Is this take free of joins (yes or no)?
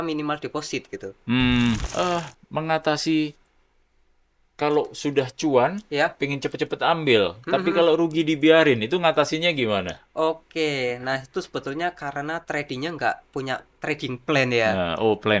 no